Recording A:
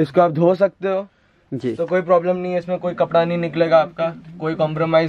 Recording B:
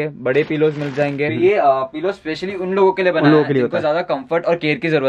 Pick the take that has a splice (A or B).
B